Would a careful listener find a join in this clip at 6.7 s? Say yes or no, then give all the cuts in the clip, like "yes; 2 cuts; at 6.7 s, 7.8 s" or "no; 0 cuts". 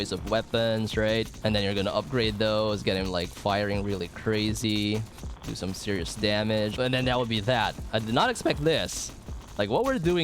yes; 2 cuts; at 1.3 s, 6.7 s